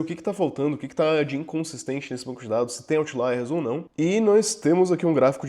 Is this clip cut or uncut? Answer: cut